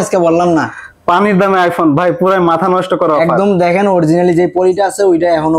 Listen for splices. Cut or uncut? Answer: uncut